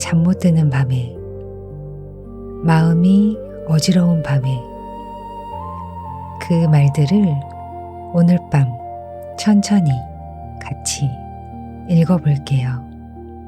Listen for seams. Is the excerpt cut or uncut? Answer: cut